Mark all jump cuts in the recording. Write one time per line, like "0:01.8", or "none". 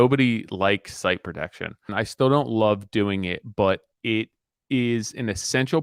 0:01.8